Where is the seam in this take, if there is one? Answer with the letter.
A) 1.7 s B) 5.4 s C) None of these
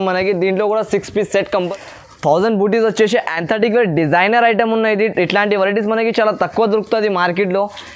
A